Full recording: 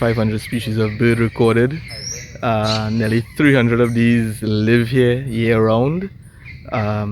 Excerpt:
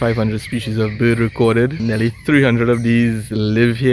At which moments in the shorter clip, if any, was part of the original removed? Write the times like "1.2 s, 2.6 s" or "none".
1.8 s

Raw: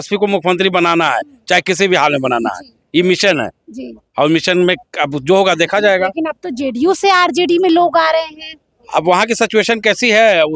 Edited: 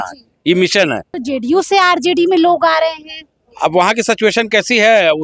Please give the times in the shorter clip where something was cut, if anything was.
1.1 s

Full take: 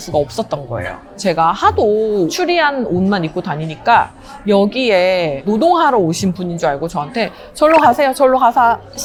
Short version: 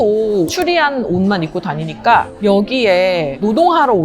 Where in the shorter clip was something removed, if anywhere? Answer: 2.3 s

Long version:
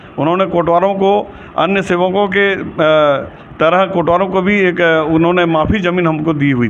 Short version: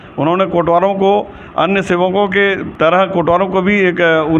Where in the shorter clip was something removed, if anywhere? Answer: 2.6 s

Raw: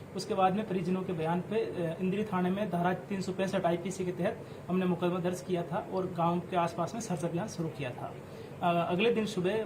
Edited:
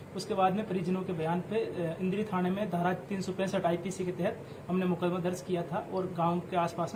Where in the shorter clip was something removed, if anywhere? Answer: none

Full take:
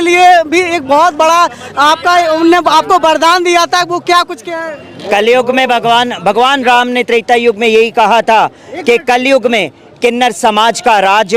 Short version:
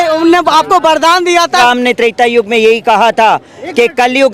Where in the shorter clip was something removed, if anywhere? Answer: 1.6 s

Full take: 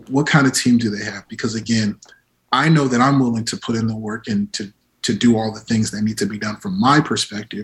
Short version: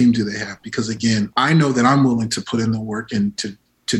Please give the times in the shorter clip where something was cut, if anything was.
1.3 s

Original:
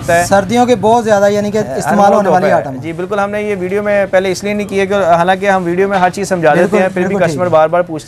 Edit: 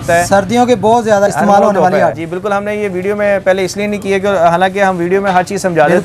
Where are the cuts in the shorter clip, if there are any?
1.3 s, 2.2 s

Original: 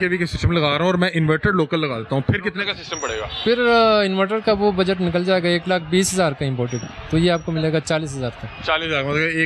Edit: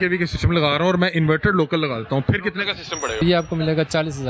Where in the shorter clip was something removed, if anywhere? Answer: 3.2 s

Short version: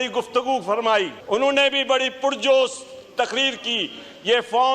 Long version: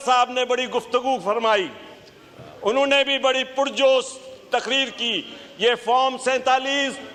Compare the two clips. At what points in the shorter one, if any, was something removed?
1.2 s

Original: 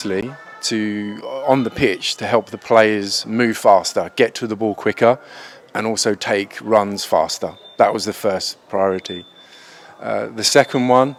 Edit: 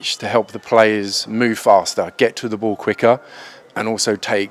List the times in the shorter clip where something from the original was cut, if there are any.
none

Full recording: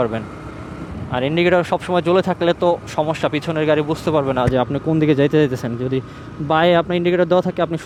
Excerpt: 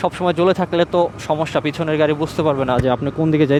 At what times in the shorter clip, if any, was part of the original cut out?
none

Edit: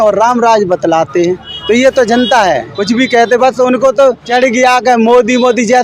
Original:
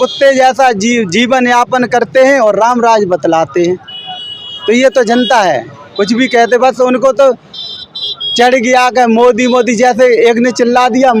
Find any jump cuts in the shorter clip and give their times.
1.5 s, 2.7 s, 4.2 s

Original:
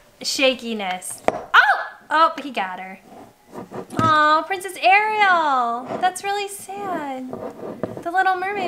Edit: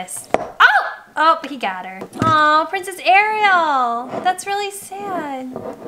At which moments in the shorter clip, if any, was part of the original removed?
2.0 s

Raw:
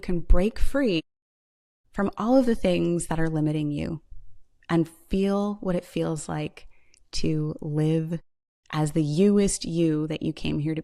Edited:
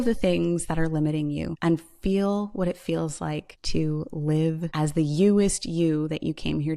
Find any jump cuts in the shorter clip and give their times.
1.5 s, 3.5 s, 4.7 s

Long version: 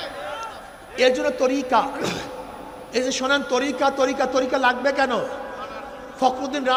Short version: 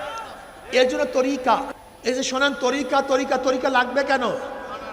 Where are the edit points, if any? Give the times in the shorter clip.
1.7 s

